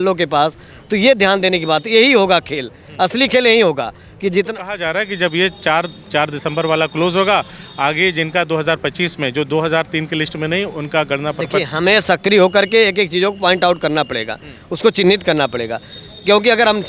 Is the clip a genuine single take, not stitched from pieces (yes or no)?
yes